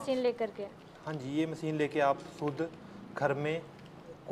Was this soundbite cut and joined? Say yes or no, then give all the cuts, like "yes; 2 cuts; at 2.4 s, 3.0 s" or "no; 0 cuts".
no; 0 cuts